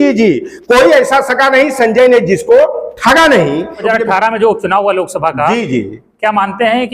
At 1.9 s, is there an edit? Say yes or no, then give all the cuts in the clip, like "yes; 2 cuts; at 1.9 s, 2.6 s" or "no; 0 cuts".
no; 1 cut; at 3.8 s